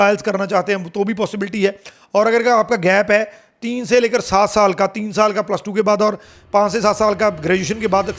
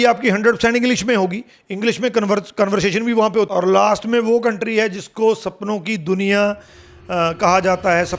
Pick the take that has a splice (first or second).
second